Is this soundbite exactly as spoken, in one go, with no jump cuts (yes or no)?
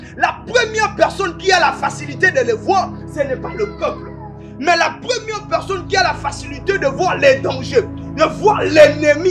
yes